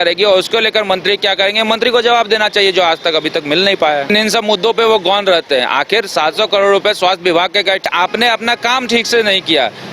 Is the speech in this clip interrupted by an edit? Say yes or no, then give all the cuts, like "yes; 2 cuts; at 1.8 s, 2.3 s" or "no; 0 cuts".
yes; 2 cuts; at 4.1 s, 7.8 s